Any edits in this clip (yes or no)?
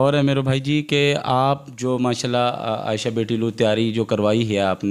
no